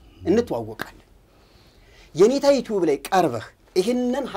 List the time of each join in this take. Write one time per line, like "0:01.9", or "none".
none